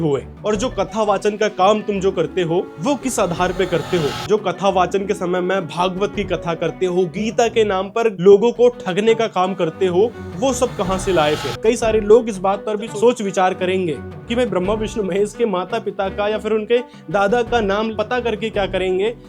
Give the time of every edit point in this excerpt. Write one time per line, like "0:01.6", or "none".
0:04.2
0:07.1
0:11.5
0:17.9